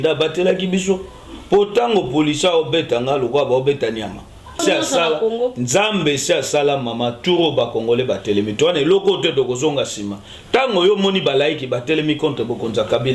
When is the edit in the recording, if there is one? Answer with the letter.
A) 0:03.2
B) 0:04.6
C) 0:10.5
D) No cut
B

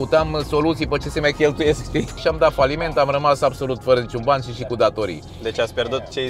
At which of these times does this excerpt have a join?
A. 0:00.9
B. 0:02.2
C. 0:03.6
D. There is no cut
B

